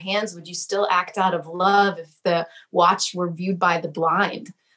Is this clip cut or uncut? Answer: uncut